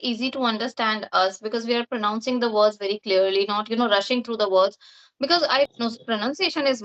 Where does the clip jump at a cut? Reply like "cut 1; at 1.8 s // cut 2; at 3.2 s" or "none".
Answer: cut 1; at 5.7 s